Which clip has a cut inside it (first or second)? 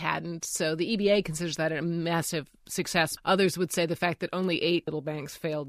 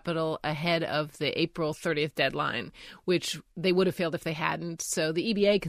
first